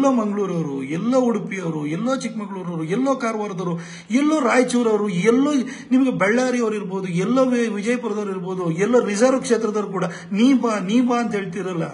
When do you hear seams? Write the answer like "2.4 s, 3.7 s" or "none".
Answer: none